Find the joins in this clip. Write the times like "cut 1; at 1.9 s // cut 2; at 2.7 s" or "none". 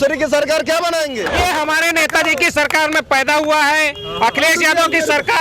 cut 1; at 1.3 s